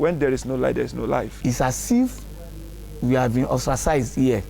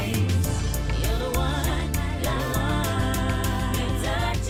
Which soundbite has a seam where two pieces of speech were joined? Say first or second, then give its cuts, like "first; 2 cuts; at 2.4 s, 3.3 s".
first; 1 cut; at 1.3 s